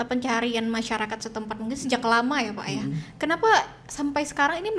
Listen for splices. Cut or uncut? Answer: uncut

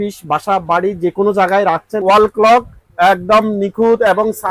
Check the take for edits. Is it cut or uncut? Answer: cut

